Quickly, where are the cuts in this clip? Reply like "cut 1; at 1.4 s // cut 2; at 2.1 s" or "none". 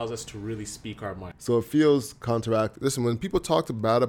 cut 1; at 1.3 s // cut 2; at 2.7 s